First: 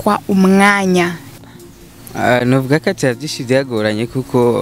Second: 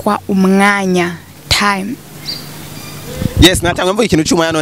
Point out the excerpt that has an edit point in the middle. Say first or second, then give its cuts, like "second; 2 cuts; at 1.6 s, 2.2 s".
first; 1 cut; at 1.5 s